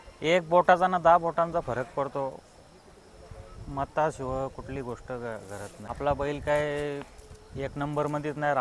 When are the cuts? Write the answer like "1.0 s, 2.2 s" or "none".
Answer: 5.8 s